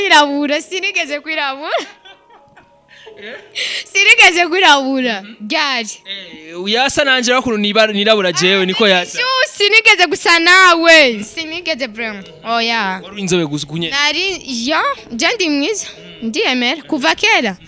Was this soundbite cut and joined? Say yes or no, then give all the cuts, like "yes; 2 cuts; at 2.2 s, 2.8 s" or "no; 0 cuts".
no; 0 cuts